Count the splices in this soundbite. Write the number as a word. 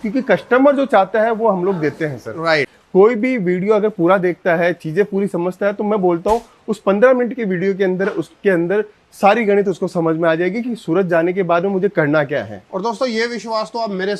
one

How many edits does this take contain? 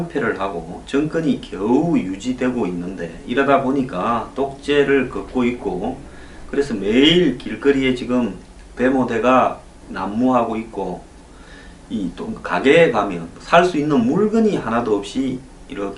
one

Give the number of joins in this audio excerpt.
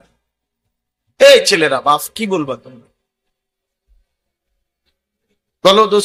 zero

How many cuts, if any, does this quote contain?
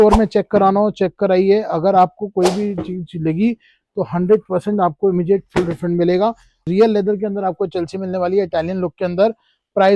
one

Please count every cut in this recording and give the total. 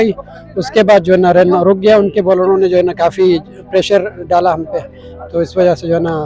zero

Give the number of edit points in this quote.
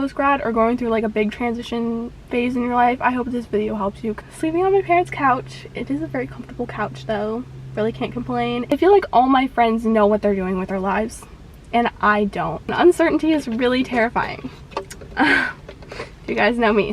three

